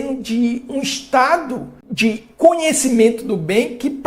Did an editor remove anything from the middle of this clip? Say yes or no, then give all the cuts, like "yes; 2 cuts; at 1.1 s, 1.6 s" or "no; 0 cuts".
yes; 1 cut; at 1.8 s